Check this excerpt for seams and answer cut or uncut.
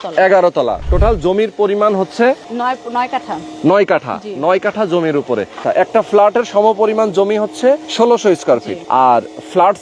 cut